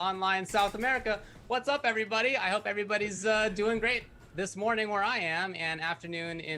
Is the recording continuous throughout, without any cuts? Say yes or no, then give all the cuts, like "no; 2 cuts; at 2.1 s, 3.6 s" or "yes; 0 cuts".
yes; 0 cuts